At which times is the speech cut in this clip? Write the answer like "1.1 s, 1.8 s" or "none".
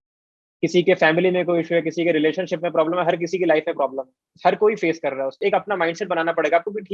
4.3 s, 5.4 s